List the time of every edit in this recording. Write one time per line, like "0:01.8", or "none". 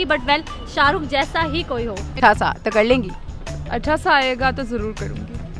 0:02.0